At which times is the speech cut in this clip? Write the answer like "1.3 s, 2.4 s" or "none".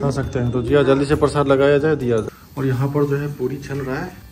2.3 s

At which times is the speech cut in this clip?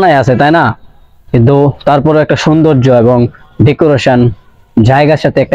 none

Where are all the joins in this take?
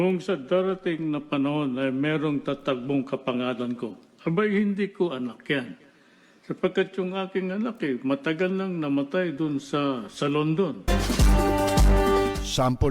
10.9 s

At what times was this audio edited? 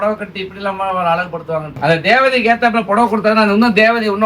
1.8 s

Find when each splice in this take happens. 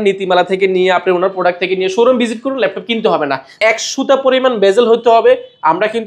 3.5 s

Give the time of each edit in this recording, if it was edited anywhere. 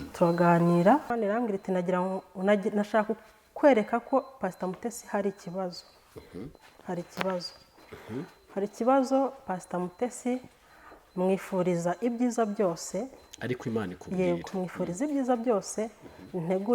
1.1 s

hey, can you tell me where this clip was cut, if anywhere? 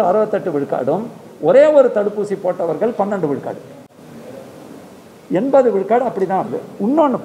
none

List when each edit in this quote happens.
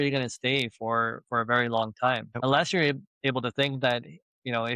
2.3 s

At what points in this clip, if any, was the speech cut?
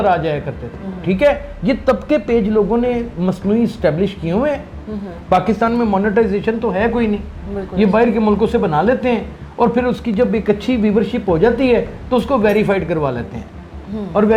none

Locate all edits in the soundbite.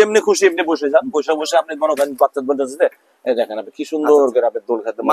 none

